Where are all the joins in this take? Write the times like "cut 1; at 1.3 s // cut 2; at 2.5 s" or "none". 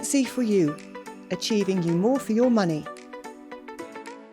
cut 1; at 2.8 s